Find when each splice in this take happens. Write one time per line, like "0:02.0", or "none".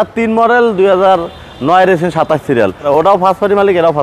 0:02.9